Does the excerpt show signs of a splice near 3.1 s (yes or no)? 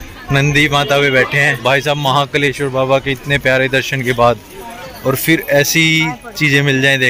no